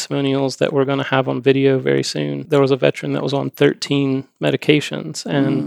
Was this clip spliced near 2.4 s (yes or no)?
yes